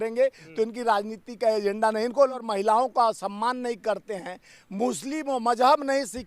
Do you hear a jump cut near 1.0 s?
no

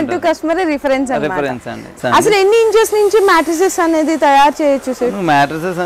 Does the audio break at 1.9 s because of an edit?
yes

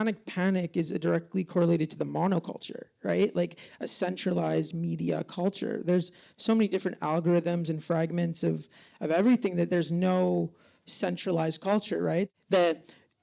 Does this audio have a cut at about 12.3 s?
yes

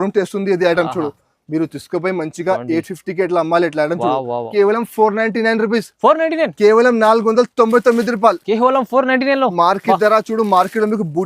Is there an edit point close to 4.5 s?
yes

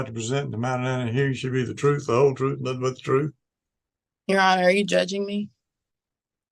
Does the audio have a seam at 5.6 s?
no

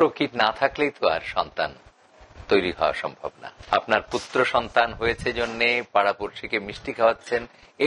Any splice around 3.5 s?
yes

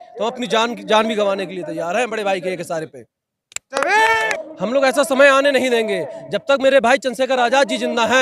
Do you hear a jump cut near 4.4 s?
yes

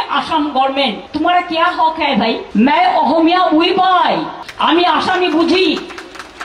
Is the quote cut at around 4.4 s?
yes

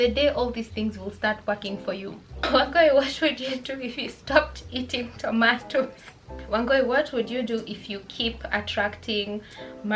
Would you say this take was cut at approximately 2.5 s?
yes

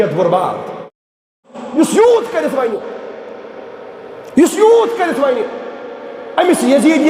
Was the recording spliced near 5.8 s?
no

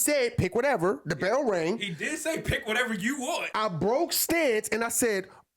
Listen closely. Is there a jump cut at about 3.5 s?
yes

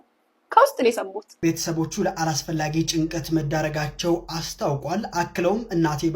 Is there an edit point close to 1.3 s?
yes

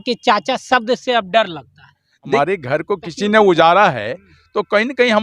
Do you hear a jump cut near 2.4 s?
yes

